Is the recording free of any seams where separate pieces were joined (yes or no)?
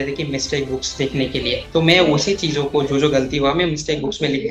yes